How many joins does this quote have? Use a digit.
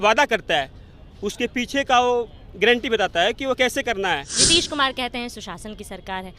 1